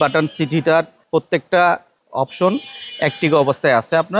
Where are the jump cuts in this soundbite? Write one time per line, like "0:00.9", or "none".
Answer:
0:01.0
0:02.0